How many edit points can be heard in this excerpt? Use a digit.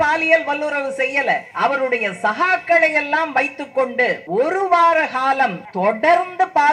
3